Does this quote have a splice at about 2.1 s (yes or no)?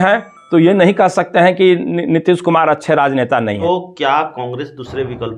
no